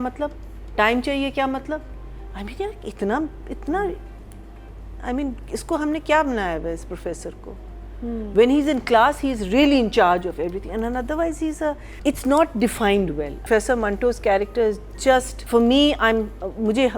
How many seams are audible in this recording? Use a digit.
3